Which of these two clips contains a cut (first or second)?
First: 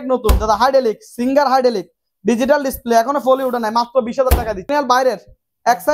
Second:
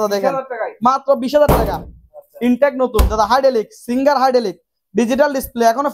first